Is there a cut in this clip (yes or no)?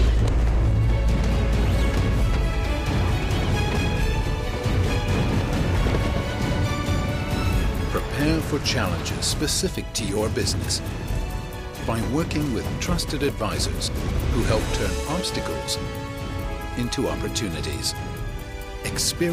no